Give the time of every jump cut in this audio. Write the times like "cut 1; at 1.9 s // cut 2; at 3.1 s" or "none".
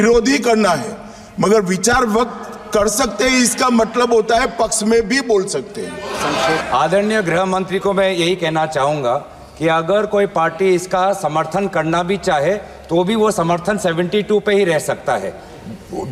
cut 1; at 6.6 s